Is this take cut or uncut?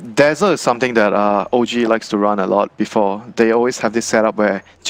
uncut